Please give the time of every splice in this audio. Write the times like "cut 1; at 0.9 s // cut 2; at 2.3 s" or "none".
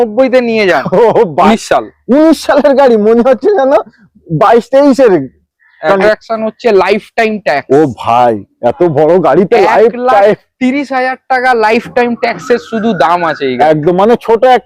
cut 1; at 1.5 s // cut 2; at 6.0 s